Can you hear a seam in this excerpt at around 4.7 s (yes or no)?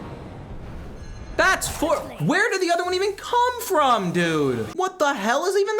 yes